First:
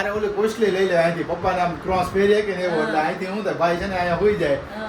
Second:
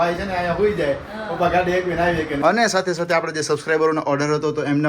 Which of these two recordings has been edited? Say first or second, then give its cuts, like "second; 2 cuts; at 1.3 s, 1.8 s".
second; 1 cut; at 2.3 s